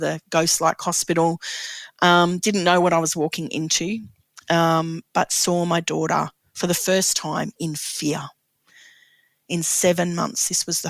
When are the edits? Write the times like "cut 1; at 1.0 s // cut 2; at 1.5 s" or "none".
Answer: none